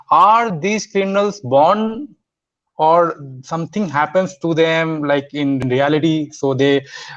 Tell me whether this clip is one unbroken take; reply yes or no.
no